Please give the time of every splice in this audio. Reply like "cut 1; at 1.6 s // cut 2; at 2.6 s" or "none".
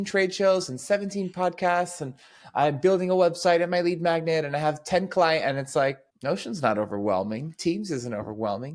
none